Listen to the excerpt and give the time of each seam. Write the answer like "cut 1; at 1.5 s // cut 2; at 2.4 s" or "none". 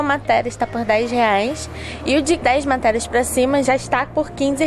cut 1; at 2.4 s // cut 2; at 3.6 s